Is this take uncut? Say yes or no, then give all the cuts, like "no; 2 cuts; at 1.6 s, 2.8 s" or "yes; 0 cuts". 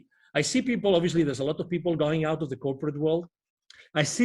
yes; 0 cuts